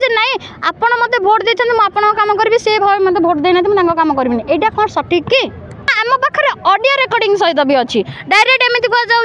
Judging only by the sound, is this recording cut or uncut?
cut